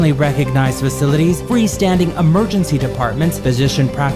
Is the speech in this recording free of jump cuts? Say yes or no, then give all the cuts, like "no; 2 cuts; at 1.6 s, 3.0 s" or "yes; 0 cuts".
yes; 0 cuts